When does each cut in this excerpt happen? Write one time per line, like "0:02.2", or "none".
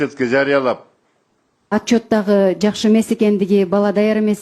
0:01.5